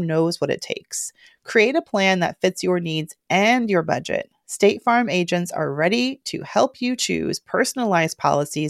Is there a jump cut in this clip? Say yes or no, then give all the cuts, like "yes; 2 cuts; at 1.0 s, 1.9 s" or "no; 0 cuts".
no; 0 cuts